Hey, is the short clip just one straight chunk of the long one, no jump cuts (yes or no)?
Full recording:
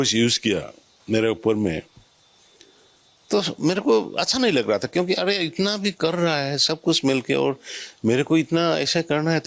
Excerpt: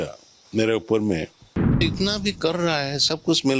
no